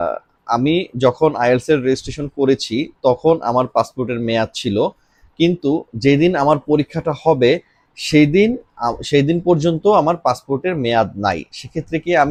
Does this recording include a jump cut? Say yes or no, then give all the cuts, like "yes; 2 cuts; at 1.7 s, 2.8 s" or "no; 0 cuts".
no; 0 cuts